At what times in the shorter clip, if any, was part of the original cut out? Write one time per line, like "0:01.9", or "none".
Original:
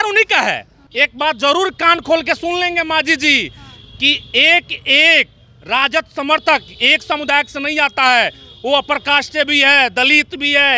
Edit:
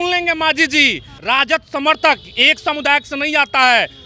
0:01.1